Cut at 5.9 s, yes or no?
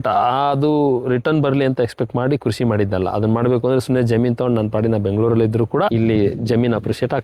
yes